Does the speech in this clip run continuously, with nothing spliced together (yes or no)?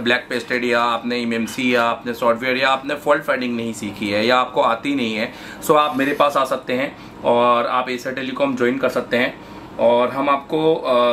yes